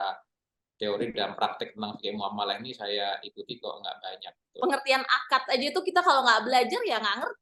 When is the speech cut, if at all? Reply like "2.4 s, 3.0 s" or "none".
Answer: 4.5 s